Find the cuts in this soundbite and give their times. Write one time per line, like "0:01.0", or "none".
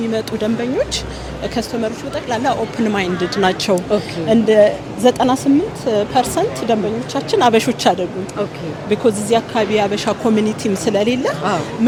none